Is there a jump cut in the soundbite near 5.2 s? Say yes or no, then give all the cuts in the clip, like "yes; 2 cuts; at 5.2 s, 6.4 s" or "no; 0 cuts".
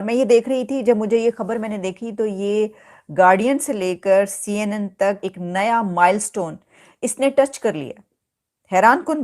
yes; 1 cut; at 5.2 s